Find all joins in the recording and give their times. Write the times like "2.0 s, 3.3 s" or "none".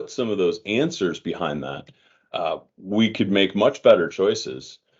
none